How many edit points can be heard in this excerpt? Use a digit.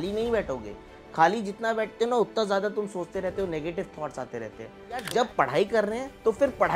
1